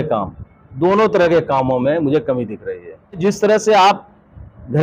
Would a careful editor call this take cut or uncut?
cut